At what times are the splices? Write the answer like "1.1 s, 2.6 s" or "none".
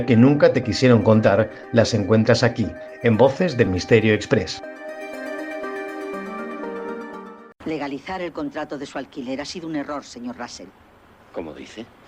7.4 s